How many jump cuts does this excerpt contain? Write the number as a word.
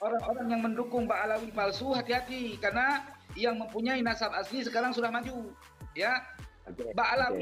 zero